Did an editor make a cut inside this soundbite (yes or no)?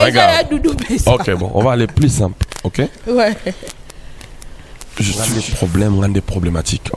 yes